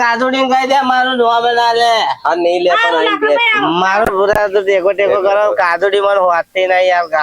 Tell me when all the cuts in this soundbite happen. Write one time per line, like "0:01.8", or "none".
0:04.1